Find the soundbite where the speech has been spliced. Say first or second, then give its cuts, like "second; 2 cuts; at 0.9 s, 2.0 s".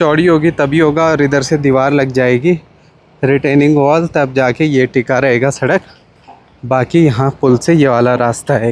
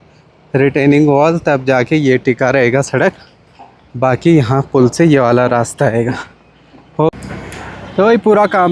second; 1 cut; at 7.1 s